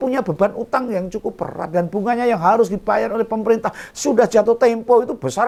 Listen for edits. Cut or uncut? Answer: uncut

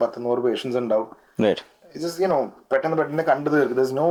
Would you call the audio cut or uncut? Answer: uncut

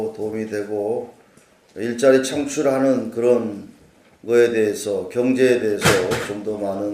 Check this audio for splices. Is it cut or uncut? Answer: cut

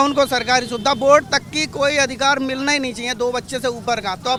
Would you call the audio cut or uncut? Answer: uncut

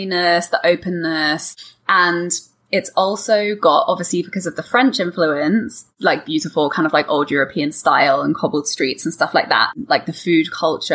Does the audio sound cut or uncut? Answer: cut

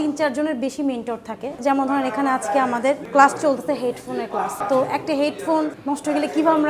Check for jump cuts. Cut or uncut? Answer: cut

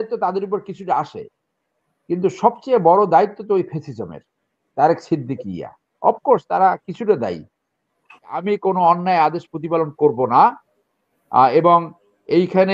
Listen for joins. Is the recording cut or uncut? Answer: cut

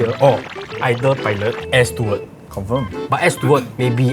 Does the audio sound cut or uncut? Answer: uncut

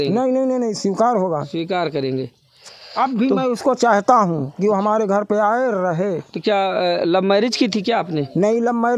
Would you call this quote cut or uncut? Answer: uncut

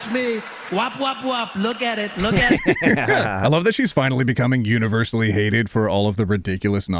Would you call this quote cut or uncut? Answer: cut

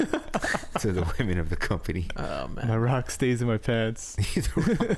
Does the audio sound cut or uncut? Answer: cut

